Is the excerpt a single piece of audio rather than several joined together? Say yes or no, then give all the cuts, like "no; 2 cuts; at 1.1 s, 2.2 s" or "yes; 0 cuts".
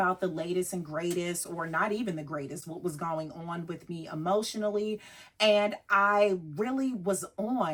yes; 0 cuts